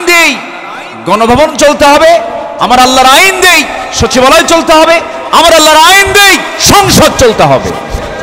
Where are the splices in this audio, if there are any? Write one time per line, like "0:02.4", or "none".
none